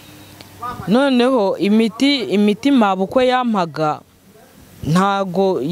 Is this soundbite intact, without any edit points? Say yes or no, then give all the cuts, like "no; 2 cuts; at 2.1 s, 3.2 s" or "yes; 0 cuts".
yes; 0 cuts